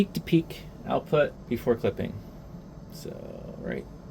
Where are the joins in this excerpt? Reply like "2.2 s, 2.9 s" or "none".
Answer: 1.4 s